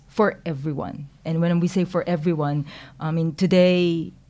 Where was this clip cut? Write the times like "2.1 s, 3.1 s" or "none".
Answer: none